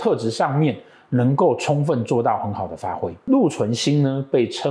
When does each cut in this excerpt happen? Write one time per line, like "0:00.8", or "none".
0:03.1